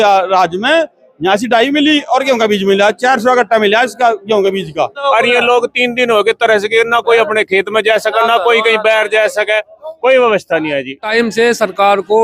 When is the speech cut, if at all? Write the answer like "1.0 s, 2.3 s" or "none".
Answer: 5.0 s, 11.0 s